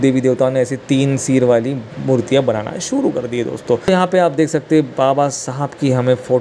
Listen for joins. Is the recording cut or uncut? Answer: uncut